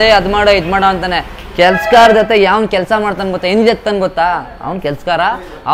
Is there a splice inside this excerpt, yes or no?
no